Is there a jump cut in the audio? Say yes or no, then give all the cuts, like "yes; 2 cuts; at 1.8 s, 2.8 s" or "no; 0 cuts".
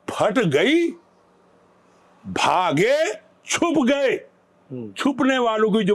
no; 0 cuts